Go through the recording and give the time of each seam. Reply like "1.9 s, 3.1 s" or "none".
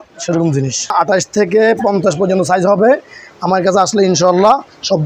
0.9 s